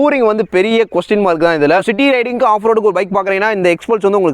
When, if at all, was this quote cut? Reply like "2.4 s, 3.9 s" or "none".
1.8 s